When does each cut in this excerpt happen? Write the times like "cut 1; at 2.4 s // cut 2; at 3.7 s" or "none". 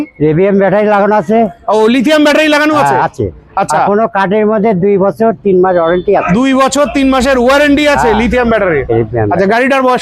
none

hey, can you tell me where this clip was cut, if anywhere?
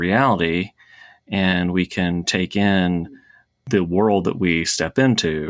cut 1; at 3.6 s

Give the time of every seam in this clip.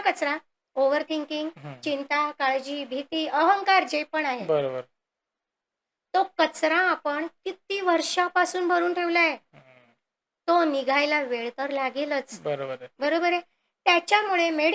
none

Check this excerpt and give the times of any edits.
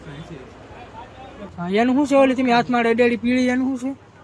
cut 1; at 1.5 s

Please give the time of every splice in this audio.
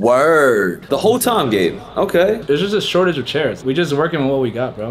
cut 1; at 0.8 s // cut 2; at 2.4 s // cut 3; at 3.6 s

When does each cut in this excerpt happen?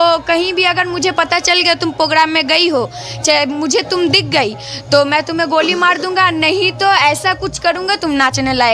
none

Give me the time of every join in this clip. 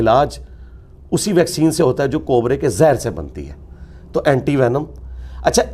none

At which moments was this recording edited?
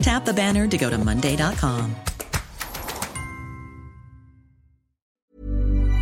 cut 1; at 5.1 s

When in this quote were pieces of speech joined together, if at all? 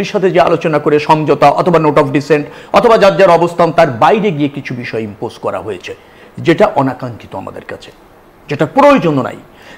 none

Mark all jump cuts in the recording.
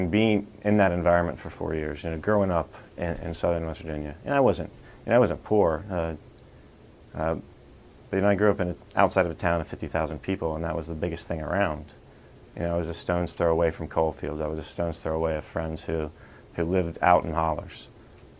cut 1; at 14.7 s

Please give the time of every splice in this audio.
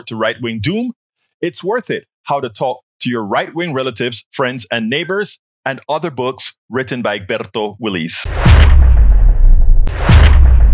cut 1; at 8.2 s // cut 2; at 9.8 s

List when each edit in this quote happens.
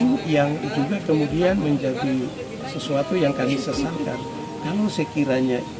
none

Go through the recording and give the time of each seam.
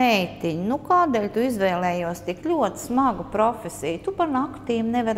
none

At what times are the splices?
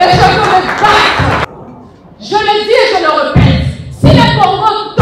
cut 1; at 1.4 s

